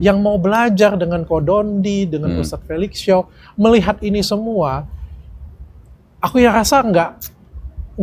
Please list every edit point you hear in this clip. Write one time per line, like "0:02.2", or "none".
none